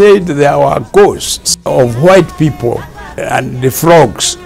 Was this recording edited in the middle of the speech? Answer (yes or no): yes